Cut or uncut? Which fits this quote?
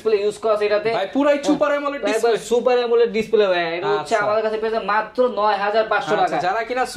uncut